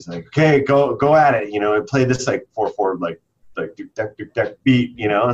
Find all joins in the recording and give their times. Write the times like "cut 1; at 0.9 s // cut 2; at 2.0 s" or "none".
none

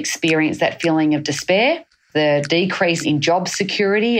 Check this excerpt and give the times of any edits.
cut 1; at 2.1 s // cut 2; at 3.0 s

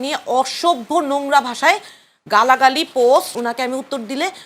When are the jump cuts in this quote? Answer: cut 1; at 3.4 s

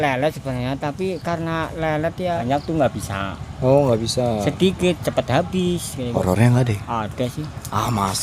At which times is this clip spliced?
cut 1; at 2.4 s // cut 2; at 6.1 s

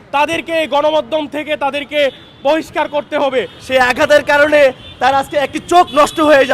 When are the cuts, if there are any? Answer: cut 1; at 3.6 s

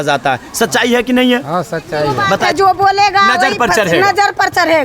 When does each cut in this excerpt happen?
cut 1; at 2.5 s

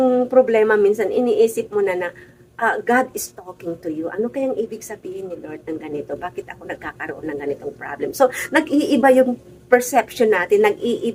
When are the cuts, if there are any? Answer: none

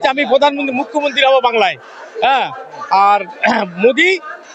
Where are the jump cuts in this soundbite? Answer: none

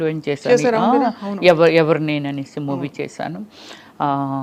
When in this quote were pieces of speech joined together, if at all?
none

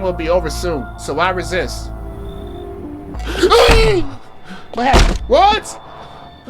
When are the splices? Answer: cut 1; at 0.9 s

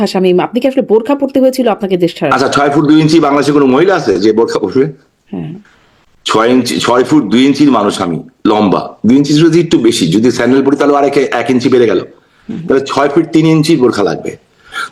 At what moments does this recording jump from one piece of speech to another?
none

